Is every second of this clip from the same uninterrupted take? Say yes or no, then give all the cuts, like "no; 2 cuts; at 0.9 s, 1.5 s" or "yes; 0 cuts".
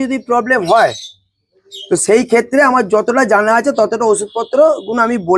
yes; 0 cuts